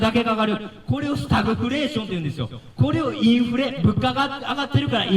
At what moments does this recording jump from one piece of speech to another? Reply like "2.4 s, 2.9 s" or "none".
none